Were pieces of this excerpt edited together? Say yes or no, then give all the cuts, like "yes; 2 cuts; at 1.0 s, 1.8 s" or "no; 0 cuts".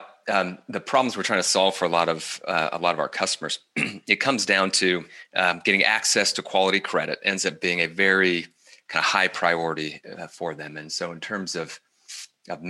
yes; 1 cut; at 5.2 s